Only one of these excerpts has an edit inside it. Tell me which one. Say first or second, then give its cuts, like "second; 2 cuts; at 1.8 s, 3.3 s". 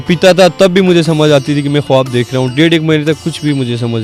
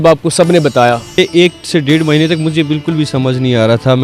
second; 1 cut; at 1.2 s